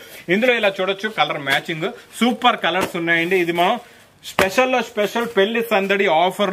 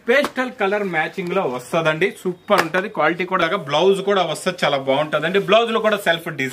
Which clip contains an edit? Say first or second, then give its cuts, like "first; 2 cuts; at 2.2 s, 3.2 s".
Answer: second; 1 cut; at 3.4 s